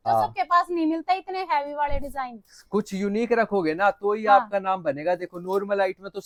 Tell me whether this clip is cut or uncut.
uncut